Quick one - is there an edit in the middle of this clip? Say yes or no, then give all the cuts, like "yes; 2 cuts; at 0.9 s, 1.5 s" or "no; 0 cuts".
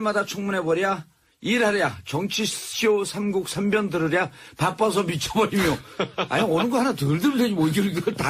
yes; 1 cut; at 5.0 s